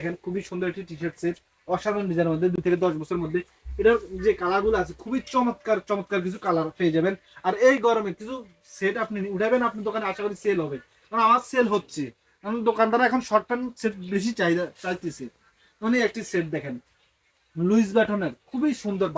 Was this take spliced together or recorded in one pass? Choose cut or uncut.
uncut